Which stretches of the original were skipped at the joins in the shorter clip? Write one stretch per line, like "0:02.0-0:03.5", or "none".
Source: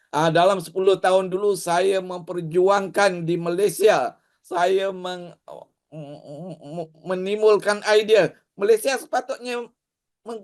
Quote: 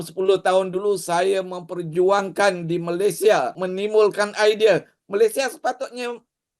0:04.1-0:07.0